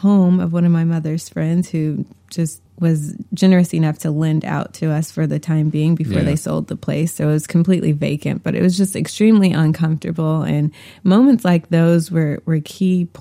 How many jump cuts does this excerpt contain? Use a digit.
1